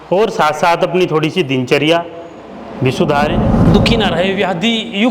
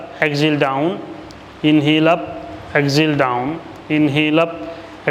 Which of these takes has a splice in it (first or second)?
first